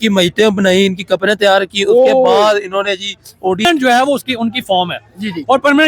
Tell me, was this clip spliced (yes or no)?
yes